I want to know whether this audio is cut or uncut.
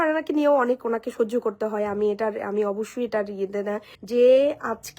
cut